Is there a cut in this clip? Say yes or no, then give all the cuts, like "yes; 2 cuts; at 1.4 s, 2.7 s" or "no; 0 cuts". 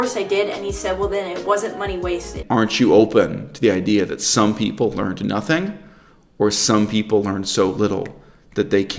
yes; 1 cut; at 2.4 s